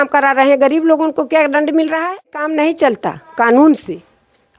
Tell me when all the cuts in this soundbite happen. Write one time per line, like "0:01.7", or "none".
0:02.5